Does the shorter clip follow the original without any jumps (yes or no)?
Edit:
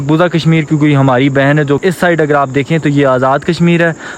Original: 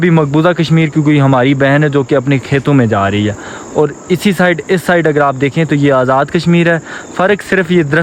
no